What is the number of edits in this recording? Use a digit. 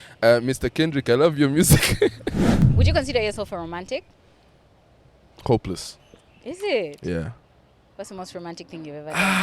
1